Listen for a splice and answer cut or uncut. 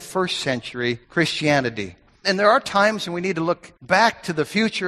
cut